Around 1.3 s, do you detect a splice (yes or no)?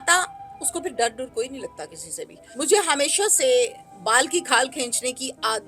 no